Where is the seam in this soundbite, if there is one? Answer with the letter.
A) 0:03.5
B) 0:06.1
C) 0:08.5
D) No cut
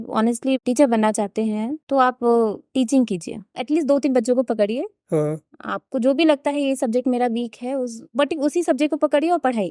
A